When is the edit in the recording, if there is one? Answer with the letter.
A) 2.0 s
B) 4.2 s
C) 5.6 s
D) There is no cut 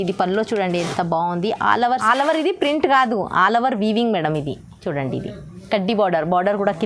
A